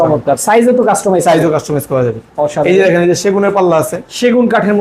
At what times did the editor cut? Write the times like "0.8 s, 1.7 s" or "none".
none